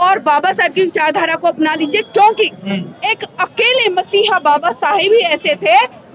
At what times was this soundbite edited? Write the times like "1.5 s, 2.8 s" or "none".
none

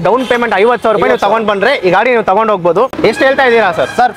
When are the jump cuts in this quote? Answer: 2.9 s

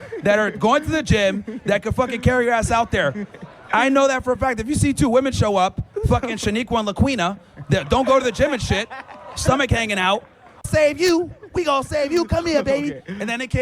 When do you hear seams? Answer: 10.6 s

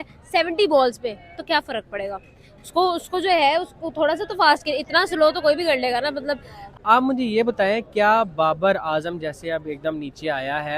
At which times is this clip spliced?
6.7 s

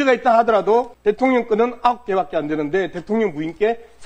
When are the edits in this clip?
0.9 s

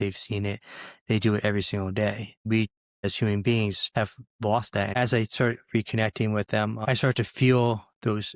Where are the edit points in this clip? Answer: 2.5 s, 3.8 s, 5.0 s, 6.8 s

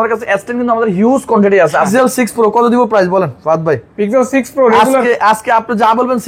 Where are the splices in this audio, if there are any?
1.9 s

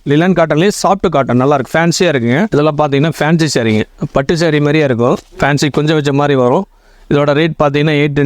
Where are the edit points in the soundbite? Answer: 2.5 s, 5.3 s

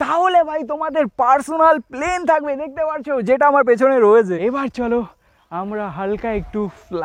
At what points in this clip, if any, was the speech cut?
4.4 s

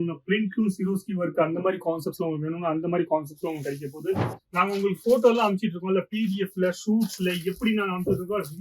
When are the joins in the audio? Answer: 4.3 s

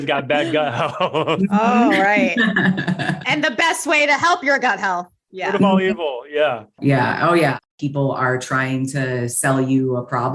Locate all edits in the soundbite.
6.7 s, 7.6 s

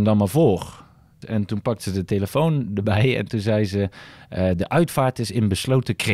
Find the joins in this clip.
1.2 s

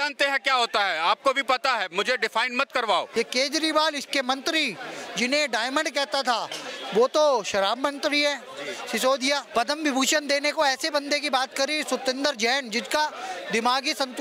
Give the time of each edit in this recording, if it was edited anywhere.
3.1 s, 9.5 s

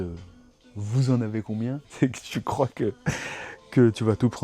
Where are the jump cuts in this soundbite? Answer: 1.8 s

